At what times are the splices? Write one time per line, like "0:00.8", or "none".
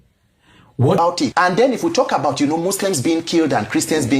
0:01.0